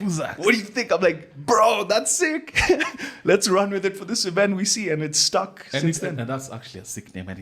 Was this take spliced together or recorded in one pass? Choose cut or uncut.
uncut